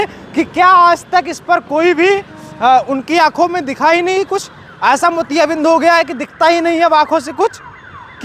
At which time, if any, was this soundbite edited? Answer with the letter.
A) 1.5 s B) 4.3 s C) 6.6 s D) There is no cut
D